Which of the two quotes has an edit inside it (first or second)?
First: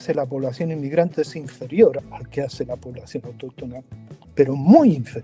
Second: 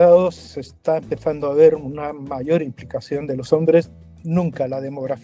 second